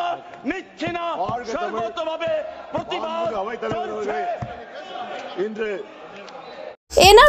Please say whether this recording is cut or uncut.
uncut